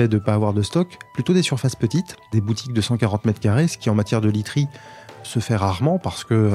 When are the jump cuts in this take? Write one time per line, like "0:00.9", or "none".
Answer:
0:02.3
0:05.2